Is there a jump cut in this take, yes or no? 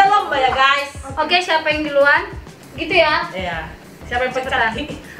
no